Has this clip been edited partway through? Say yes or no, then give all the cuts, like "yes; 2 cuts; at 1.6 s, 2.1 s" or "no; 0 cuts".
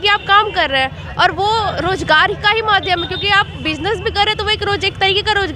no; 0 cuts